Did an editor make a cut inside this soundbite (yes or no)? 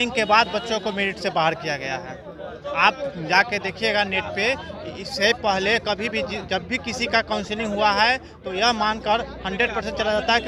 no